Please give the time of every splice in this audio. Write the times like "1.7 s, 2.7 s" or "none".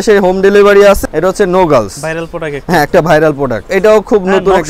1.0 s, 3.6 s